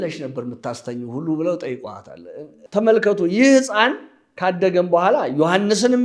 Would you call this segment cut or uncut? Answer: cut